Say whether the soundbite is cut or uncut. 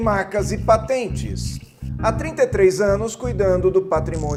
uncut